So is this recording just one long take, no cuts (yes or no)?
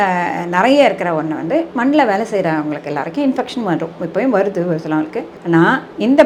yes